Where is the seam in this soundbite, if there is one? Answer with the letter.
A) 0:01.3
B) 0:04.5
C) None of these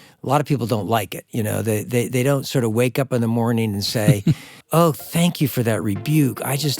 B